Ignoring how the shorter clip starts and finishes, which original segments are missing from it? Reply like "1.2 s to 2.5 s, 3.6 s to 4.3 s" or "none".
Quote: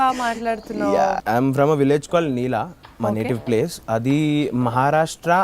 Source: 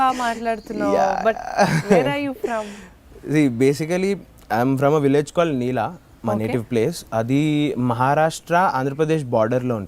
1.2 s to 4.4 s